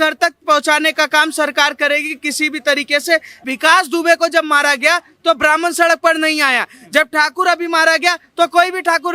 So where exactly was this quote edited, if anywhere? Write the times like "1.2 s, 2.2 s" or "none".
3.5 s

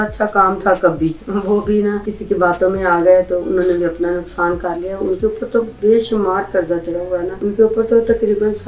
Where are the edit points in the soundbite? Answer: 2.1 s, 7.3 s

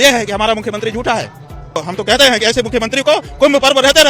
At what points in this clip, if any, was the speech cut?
1.8 s

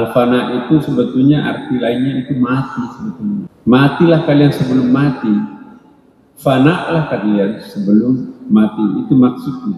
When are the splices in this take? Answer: 3.5 s

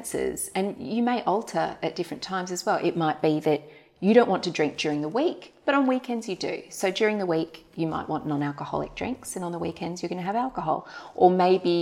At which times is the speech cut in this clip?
none

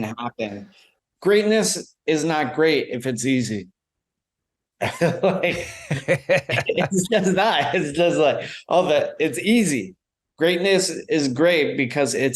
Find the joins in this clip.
0.9 s

